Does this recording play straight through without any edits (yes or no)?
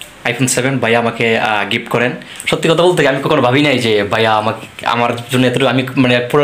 no